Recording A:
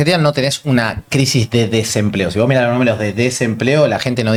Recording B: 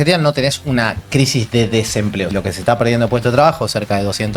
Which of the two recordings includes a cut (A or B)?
B